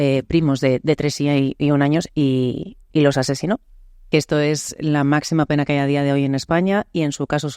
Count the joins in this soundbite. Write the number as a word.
one